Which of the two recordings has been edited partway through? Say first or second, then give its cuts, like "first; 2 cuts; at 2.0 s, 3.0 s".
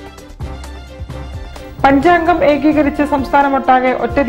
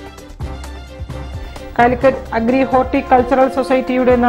first; 1 cut; at 1.4 s